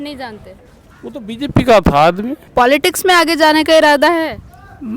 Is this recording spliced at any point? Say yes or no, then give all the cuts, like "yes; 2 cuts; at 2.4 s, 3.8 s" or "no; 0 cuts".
yes; 1 cut; at 2.3 s